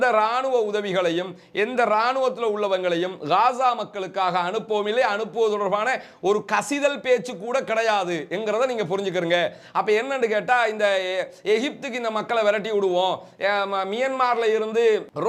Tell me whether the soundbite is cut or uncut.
uncut